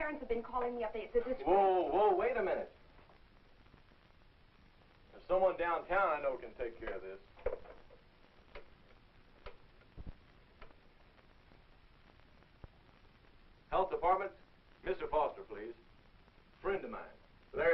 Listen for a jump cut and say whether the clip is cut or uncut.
cut